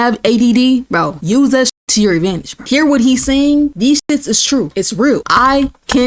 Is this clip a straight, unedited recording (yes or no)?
no